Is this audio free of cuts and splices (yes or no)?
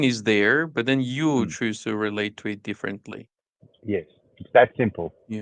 yes